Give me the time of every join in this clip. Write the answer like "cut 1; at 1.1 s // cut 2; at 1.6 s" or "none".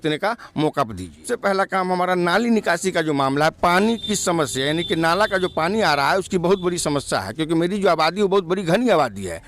cut 1; at 1.2 s